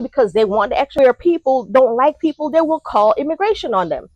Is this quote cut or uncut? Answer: cut